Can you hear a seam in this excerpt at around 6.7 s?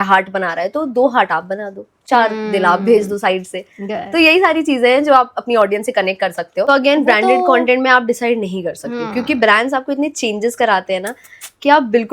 yes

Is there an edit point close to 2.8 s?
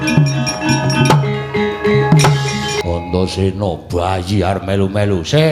yes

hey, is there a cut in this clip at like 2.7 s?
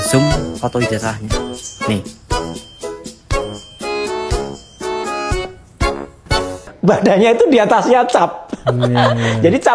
no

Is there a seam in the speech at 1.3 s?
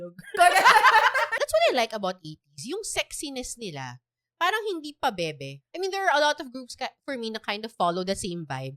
yes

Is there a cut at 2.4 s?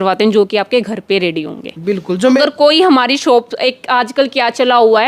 yes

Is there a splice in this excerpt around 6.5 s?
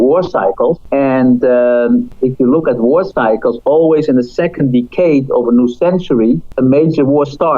yes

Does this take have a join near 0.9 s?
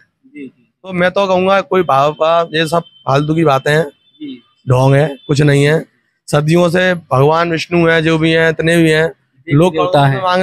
yes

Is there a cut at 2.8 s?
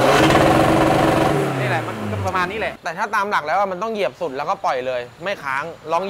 yes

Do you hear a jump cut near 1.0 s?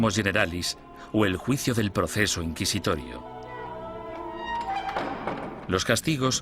yes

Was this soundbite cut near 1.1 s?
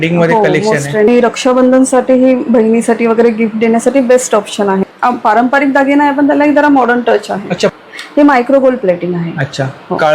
yes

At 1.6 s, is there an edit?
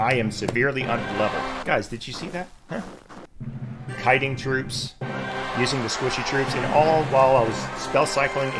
yes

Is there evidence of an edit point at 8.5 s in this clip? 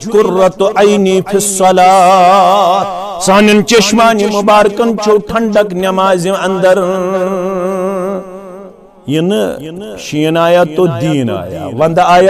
no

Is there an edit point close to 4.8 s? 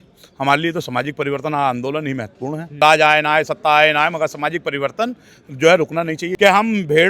no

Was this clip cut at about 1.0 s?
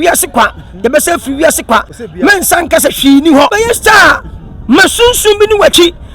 no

